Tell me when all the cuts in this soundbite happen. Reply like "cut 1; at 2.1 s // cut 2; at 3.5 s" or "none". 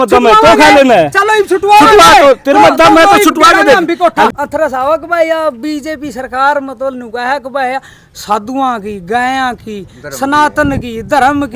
cut 1; at 4.3 s